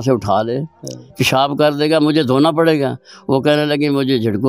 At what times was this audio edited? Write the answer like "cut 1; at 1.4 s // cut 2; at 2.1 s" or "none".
none